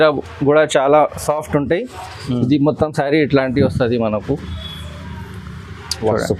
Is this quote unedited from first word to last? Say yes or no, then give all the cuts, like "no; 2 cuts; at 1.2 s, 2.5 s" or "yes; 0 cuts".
yes; 0 cuts